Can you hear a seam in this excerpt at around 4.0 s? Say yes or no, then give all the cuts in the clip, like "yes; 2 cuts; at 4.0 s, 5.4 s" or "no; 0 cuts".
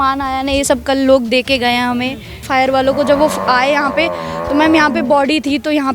no; 1 cut; at 2.4 s